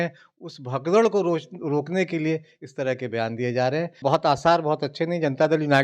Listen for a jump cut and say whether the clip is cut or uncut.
cut